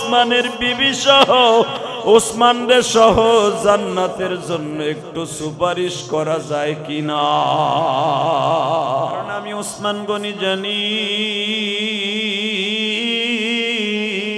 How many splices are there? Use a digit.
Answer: 1